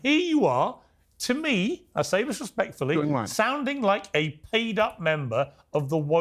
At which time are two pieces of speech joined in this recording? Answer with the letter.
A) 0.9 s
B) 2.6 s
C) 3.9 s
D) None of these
D